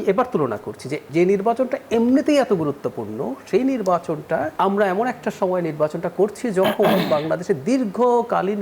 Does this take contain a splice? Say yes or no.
yes